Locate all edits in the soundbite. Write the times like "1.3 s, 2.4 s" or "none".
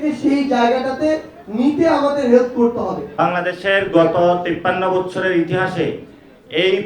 3.0 s